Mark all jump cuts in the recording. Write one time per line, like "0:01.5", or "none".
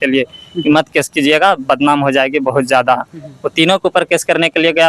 none

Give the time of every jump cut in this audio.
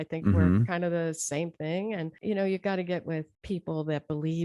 0:02.1
0:03.3

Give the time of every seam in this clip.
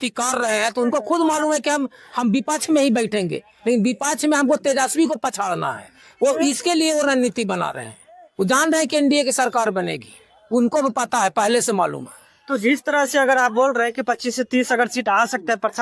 none

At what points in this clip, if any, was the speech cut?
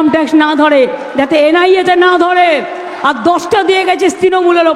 none

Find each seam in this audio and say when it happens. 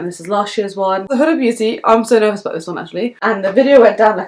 0:01.1
0:03.2

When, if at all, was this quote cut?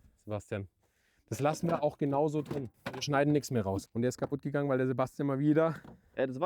0:02.7
0:03.9

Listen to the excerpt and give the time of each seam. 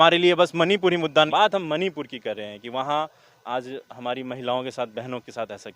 0:01.3

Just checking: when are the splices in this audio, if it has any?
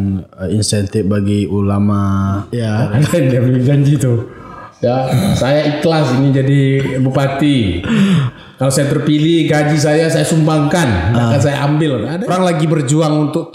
0:02.5
0:12.2

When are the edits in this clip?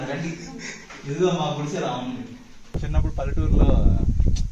0:02.8

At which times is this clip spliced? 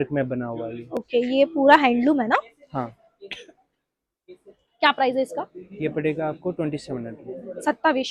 none

